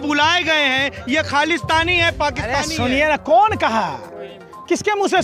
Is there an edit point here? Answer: no; 0 cuts

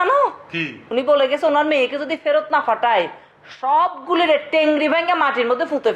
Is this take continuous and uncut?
yes; 0 cuts

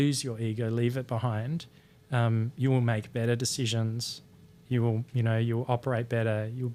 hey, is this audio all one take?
yes; 0 cuts

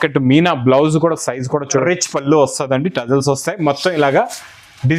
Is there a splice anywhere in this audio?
yes; 1 cut; at 1.8 s

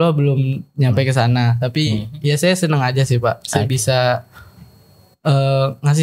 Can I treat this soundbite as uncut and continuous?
yes; 0 cuts

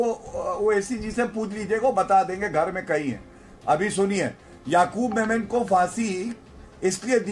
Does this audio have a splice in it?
no; 0 cuts

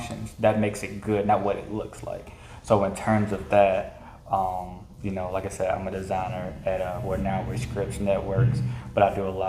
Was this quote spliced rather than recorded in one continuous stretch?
no; 0 cuts

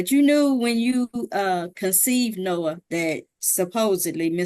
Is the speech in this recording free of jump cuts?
no; 1 cut; at 3.3 s

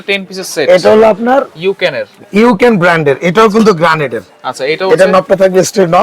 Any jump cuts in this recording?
no; 0 cuts

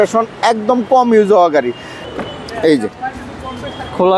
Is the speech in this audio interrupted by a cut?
yes; 1 cut; at 1.9 s

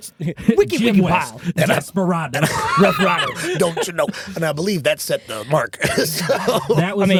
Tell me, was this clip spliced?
no; 0 cuts

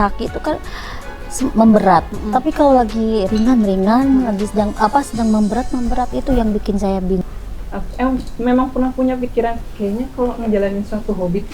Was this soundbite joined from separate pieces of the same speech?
yes; 1 cut; at 7.2 s

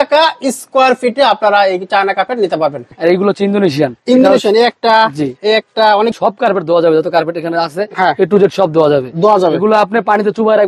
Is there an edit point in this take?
yes; 2 cuts; at 2.9 s, 6.1 s

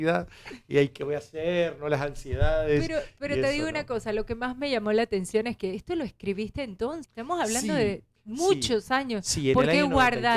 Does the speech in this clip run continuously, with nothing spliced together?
no; 1 cut; at 7.1 s

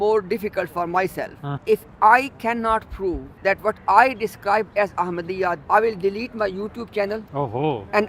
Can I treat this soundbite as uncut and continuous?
no; 3 cuts; at 1.5 s, 3.3 s, 5.6 s

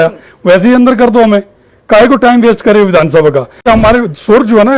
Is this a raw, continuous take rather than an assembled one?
no; 1 cut; at 3.7 s

